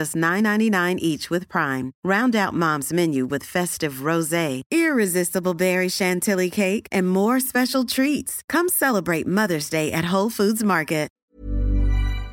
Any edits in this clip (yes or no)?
yes